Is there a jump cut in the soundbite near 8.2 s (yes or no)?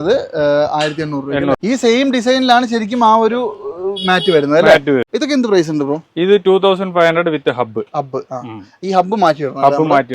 no